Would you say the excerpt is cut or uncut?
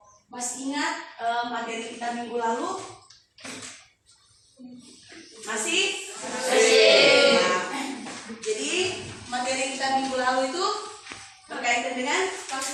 uncut